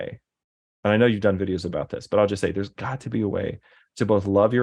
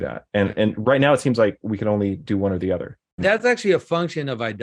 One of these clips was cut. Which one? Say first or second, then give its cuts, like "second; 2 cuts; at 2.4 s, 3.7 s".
second; 1 cut; at 3.2 s